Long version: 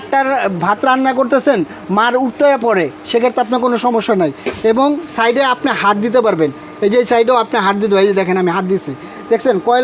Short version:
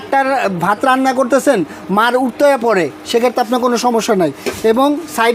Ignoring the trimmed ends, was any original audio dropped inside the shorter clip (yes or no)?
no